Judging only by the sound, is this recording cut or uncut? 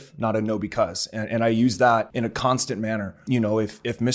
cut